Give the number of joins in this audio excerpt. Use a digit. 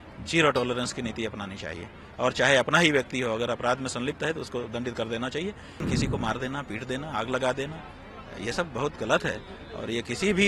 1